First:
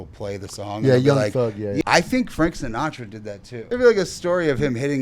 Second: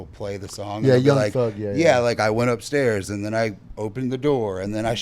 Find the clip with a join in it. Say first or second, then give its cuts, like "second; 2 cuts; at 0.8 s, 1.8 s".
first; 2 cuts; at 1.8 s, 3.5 s